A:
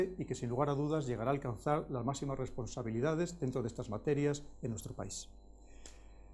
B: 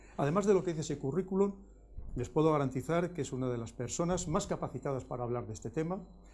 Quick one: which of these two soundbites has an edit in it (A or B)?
B